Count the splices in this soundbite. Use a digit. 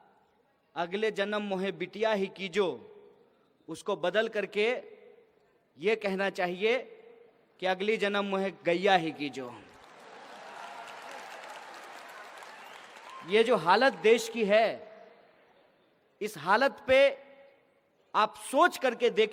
0